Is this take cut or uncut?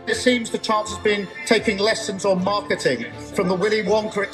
uncut